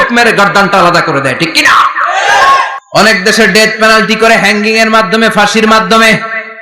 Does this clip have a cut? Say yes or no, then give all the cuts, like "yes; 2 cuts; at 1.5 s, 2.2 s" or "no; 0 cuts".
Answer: yes; 1 cut; at 2.8 s